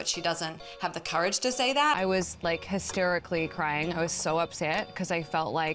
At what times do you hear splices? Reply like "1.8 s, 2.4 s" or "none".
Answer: 1.9 s